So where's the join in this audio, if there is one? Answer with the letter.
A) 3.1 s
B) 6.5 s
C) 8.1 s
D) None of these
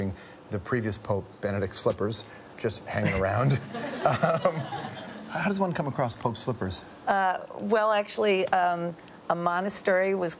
A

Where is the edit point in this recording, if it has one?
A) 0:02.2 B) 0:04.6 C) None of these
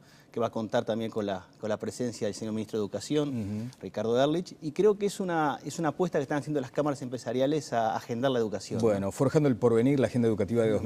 A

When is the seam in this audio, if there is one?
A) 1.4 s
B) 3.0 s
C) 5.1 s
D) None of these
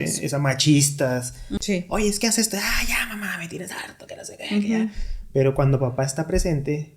A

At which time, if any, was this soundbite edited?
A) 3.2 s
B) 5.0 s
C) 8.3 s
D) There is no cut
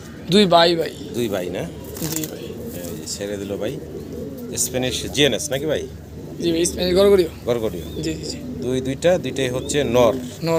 D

